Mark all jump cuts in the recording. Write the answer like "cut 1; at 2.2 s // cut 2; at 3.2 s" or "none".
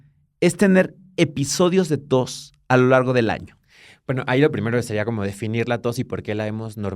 none